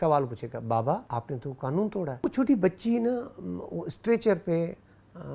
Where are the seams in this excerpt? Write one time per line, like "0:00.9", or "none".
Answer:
0:01.1
0:02.2